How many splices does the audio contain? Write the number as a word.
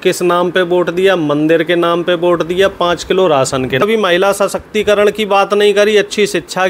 one